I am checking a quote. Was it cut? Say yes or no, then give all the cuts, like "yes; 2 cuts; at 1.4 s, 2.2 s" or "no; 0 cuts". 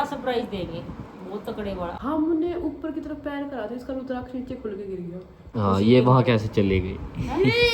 yes; 2 cuts; at 2.0 s, 5.4 s